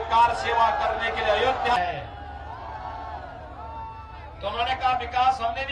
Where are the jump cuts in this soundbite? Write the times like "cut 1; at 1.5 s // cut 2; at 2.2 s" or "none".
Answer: cut 1; at 1.8 s